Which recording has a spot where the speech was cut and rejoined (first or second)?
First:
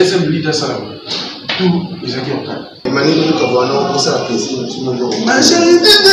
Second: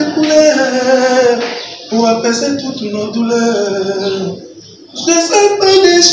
first